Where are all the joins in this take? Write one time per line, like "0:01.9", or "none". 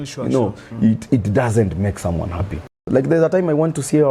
0:02.9